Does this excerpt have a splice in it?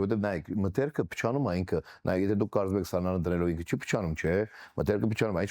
no; 0 cuts

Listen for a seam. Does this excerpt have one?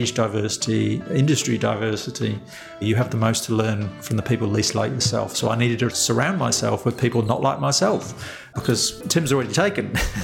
yes; 2 cuts; at 2.8 s, 6.0 s

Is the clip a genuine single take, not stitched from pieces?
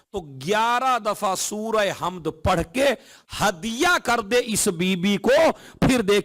yes; 0 cuts

